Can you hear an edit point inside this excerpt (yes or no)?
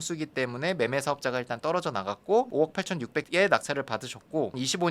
yes